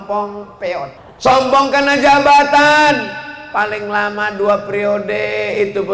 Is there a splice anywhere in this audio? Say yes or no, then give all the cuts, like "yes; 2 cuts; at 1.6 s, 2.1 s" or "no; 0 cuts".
yes; 1 cut; at 1.0 s